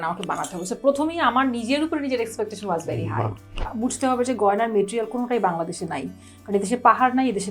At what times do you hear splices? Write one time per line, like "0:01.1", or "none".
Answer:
0:03.7